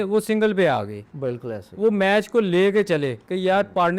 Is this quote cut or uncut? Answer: uncut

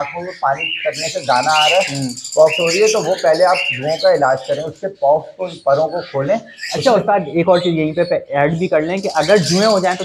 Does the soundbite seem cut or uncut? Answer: uncut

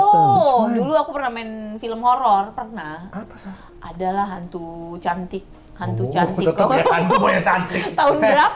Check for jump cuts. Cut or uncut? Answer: uncut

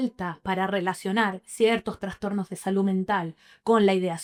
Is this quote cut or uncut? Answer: uncut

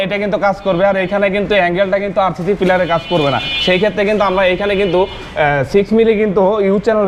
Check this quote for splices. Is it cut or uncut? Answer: uncut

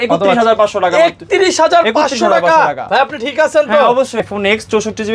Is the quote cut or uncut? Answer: cut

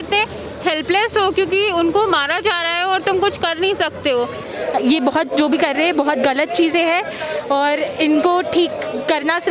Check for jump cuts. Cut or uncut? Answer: cut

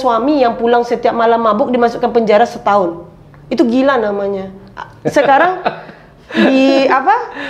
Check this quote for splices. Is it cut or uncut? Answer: uncut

